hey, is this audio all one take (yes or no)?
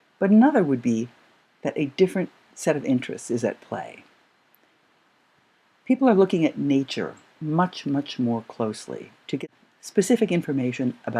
yes